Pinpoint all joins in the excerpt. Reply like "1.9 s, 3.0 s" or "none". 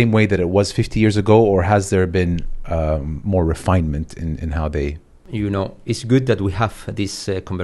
5.1 s